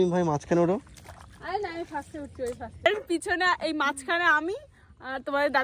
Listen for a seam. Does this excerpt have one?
yes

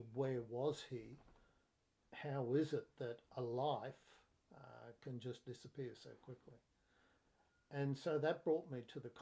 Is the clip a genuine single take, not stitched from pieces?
yes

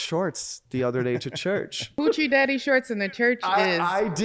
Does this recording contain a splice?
yes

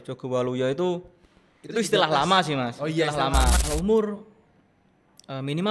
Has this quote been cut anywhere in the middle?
yes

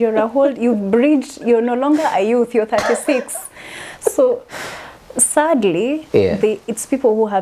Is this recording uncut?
yes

